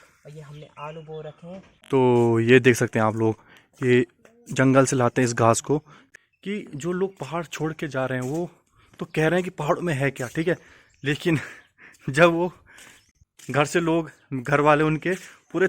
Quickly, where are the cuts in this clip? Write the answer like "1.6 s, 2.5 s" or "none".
1.7 s, 6.0 s, 13.1 s